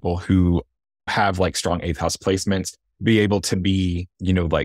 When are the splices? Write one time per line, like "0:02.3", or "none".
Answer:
0:01.1
0:02.8